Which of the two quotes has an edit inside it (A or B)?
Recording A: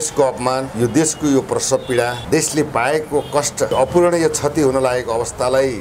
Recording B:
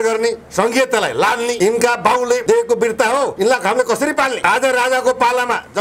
B